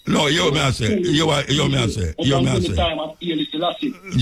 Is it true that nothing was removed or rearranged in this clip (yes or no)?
yes